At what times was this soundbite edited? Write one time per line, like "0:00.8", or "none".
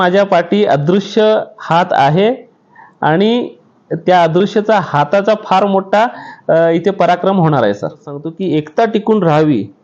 0:08.2